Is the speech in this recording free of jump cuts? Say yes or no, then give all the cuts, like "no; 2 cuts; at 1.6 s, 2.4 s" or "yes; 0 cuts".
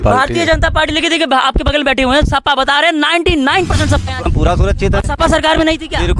no; 1 cut; at 4.3 s